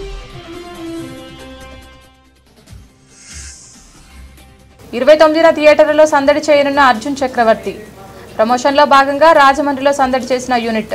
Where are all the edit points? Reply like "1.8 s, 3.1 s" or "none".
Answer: 1.6 s, 4.8 s